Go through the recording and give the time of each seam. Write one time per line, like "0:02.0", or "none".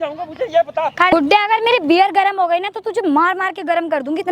0:01.1